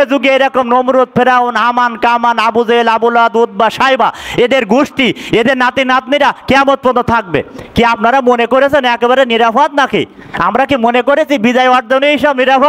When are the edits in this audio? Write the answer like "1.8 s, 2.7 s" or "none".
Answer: none